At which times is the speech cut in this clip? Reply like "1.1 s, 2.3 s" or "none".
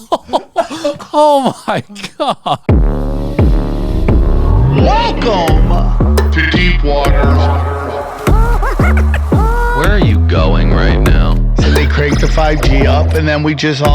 2.6 s